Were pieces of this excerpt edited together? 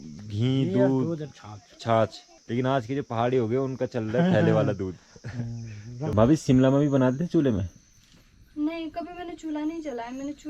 yes; 2 cuts; at 2.3 s, 6.1 s

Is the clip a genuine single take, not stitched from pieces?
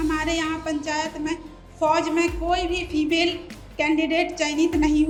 yes; 0 cuts

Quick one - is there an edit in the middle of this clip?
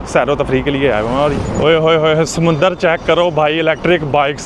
yes; 1 cut; at 1.4 s

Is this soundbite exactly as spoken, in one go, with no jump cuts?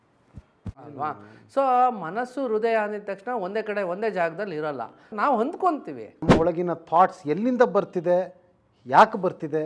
no; 3 cuts; at 0.8 s, 5.1 s, 6.3 s

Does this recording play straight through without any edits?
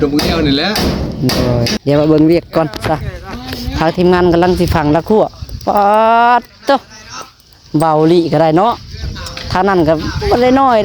no; 1 cut; at 1.7 s

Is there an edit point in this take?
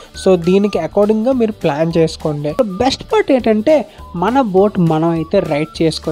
yes; 1 cut; at 2.6 s

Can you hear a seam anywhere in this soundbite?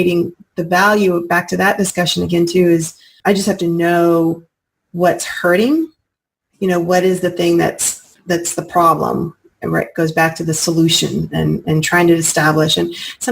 yes; 1 cut; at 3.1 s

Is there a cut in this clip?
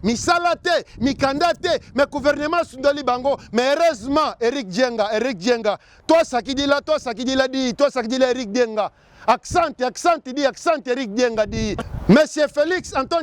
yes; 1 cut; at 11.8 s

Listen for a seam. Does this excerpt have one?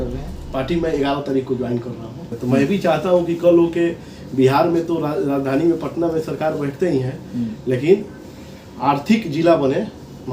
yes; 1 cut; at 2.3 s

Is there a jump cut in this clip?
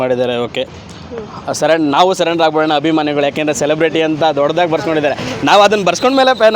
no; 0 cuts

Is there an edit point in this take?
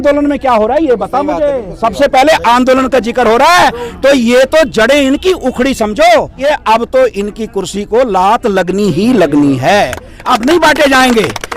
yes; 1 cut; at 6.3 s

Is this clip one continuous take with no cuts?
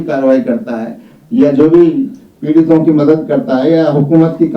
yes; 0 cuts

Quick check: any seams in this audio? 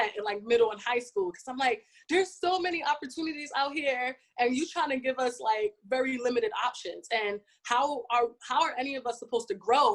no; 0 cuts

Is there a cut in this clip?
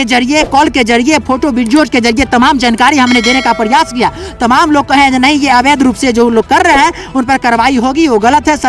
no; 0 cuts

